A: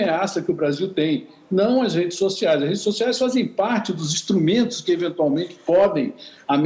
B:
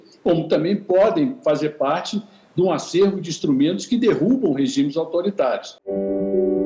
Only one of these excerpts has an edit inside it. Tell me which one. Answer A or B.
B